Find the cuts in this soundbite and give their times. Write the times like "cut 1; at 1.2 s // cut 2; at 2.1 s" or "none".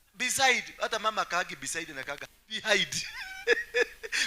cut 1; at 2.6 s